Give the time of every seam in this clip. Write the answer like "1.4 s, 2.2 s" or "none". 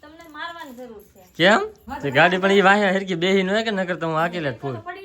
1.8 s